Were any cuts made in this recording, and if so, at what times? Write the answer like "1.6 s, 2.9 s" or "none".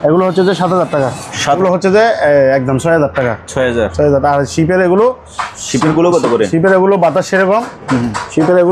1.6 s